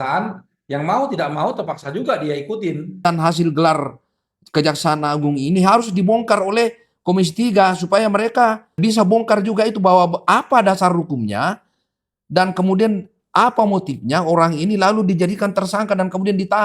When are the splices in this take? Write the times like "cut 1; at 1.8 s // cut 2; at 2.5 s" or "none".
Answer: cut 1; at 3.1 s // cut 2; at 8.8 s